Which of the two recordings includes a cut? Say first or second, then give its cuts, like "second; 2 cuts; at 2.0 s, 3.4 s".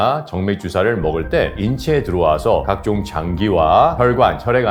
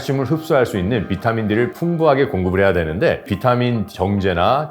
second; 2 cuts; at 1.8 s, 3.3 s